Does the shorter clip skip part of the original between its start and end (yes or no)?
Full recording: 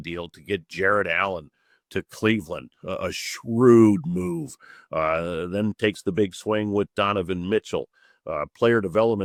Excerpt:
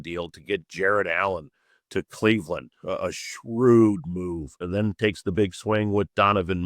yes